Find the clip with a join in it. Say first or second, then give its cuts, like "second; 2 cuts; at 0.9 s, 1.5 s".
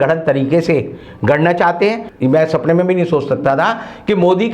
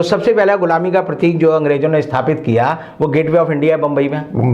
first; 1 cut; at 2.1 s